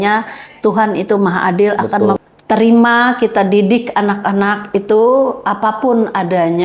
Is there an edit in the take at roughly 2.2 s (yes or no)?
yes